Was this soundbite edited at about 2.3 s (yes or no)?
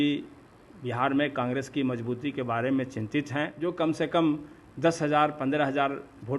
no